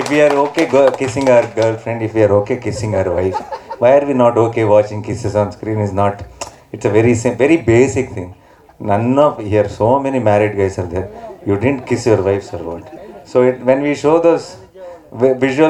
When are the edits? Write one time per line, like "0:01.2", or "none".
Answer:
none